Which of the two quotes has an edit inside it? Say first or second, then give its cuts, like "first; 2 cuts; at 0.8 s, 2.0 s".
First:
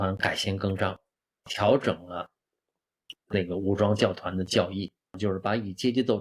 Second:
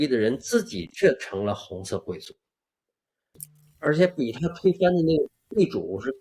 first; 1 cut; at 5.1 s